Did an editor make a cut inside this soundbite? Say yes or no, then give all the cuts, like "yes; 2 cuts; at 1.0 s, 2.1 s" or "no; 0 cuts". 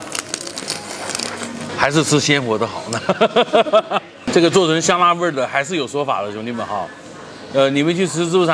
yes; 2 cuts; at 1.7 s, 4.1 s